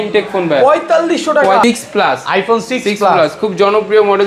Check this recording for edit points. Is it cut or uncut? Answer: cut